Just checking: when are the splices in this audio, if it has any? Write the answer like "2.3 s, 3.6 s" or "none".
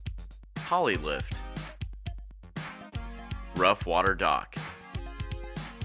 none